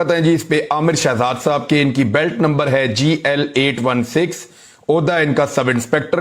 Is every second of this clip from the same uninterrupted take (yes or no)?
no